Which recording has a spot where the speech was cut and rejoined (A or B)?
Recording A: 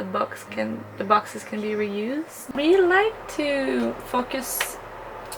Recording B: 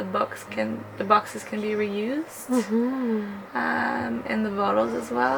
A